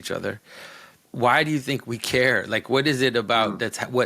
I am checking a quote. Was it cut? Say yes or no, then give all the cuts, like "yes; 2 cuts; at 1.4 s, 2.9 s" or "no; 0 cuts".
yes; 1 cut; at 1.0 s